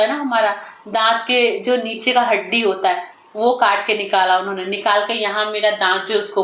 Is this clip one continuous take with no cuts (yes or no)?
yes